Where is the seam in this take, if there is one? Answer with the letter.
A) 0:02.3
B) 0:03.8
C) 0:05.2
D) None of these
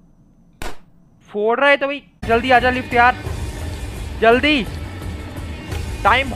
A